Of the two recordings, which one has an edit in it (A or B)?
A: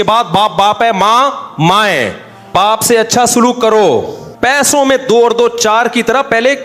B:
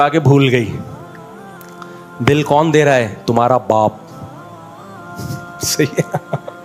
A